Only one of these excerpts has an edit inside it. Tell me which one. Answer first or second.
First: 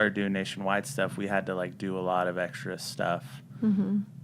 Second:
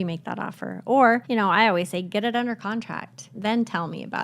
second